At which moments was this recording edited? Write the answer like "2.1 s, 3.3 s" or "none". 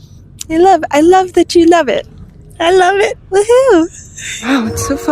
3.9 s